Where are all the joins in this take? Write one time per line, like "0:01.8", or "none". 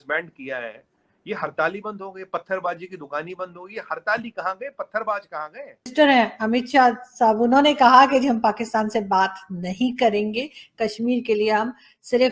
0:05.9